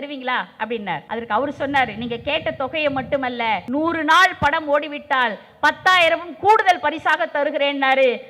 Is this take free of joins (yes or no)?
no